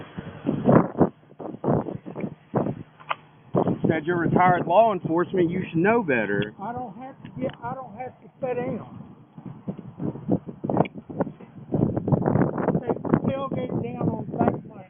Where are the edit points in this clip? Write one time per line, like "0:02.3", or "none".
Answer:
none